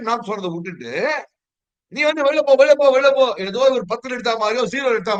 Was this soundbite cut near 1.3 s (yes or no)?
no